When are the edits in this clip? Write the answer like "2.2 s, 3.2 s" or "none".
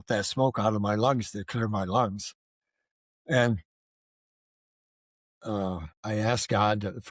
5.9 s

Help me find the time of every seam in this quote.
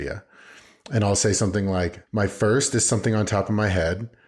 2.0 s

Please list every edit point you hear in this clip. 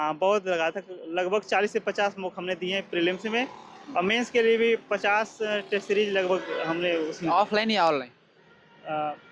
none

